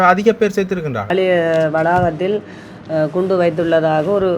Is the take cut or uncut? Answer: cut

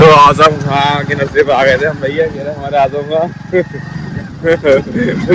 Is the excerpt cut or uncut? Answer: uncut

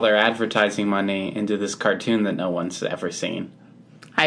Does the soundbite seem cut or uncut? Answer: uncut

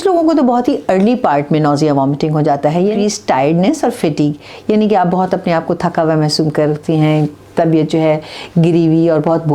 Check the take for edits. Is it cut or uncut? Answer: cut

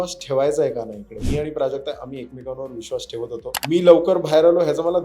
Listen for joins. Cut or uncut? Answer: cut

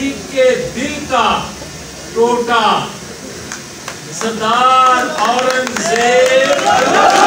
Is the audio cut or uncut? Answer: uncut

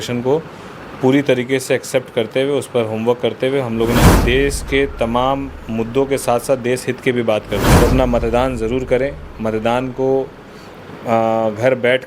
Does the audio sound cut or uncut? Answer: cut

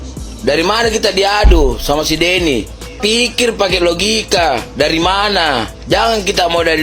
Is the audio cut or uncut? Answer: cut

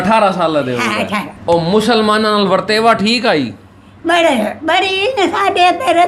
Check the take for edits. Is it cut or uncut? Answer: cut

